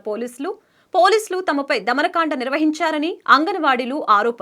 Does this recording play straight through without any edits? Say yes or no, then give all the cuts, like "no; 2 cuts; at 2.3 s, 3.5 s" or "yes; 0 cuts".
yes; 0 cuts